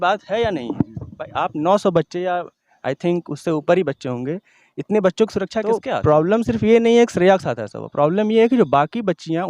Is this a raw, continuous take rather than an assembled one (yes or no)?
no